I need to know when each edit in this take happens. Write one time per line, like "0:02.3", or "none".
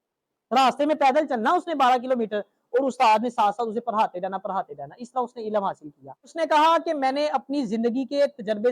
0:06.3